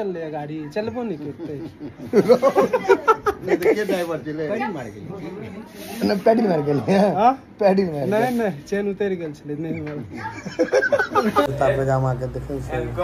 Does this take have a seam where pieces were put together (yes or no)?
yes